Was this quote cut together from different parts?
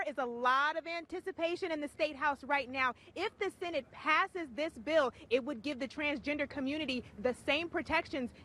no; 0 cuts

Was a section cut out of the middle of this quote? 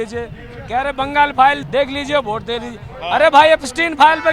yes; 1 cut; at 1.6 s

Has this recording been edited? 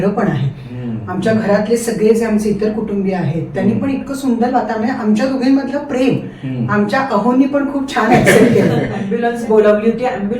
yes; 1 cut; at 9.0 s

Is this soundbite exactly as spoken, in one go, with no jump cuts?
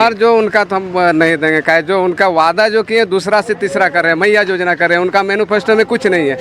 yes; 0 cuts

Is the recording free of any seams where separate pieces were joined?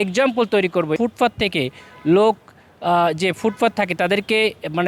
no; 1 cut; at 1.0 s

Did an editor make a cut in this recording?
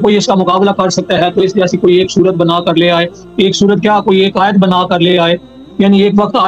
yes; 1 cut; at 5.6 s

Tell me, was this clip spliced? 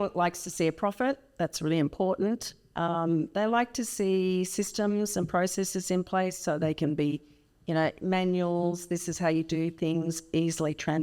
no; 0 cuts

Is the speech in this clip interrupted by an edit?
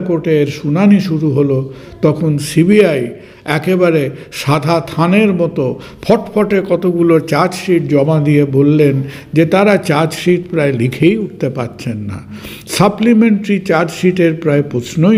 no; 0 cuts

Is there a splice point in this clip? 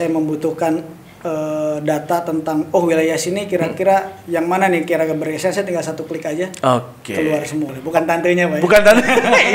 yes; 1 cut; at 7.8 s

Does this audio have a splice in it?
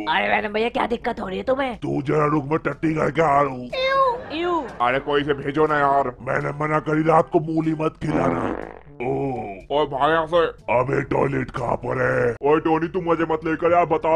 no; 0 cuts

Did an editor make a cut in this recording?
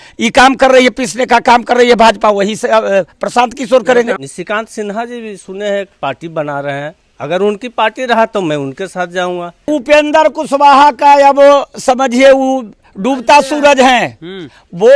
yes; 3 cuts; at 4.2 s, 7.0 s, 9.7 s

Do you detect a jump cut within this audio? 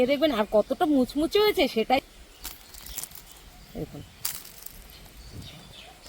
yes; 1 cut; at 2.0 s

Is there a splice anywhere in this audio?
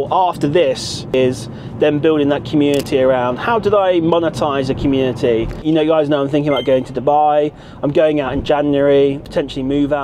yes; 3 cuts; at 1.1 s, 5.6 s, 9.2 s

